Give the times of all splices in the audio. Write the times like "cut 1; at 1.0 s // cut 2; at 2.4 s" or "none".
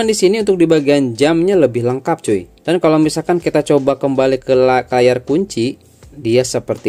cut 1; at 2.5 s